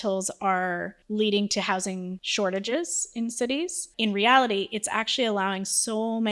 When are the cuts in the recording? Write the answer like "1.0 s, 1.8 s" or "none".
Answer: 0.9 s, 2.2 s, 3.8 s